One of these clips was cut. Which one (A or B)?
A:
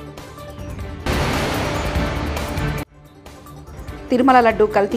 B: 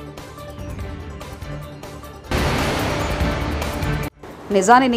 A